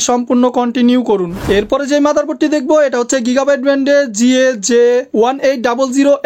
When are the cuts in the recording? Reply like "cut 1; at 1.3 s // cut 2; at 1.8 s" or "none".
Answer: none